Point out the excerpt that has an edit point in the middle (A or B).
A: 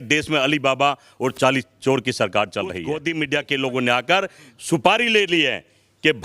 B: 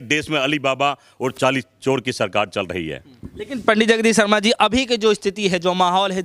A